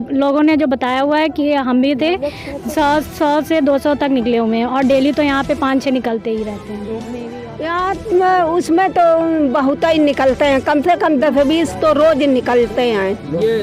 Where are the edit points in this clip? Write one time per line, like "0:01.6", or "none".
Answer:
0:07.2